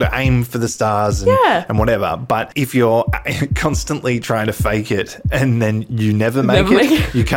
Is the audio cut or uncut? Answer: cut